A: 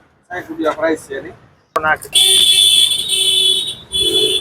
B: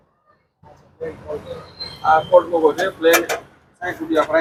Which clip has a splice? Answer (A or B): A